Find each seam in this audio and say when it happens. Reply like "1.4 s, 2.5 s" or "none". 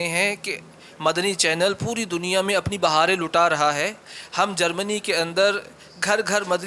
none